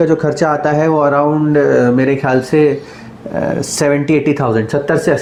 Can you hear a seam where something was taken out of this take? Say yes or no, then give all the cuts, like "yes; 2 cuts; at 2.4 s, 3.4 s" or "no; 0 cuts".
no; 0 cuts